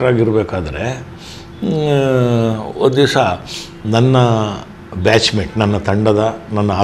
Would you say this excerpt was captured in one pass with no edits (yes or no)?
yes